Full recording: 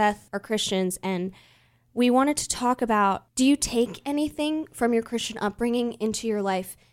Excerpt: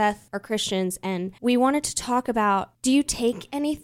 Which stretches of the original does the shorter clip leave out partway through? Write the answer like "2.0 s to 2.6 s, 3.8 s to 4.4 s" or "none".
1.3 s to 1.8 s